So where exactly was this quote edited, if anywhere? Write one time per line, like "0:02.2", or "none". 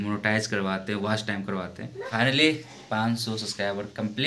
0:02.0